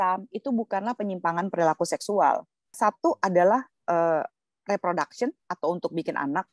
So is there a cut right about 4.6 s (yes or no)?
no